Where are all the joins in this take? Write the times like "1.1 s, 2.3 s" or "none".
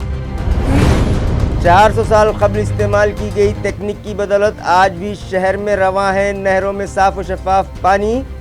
1.1 s